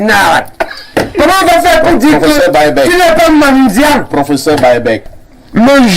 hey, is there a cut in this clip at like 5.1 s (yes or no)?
yes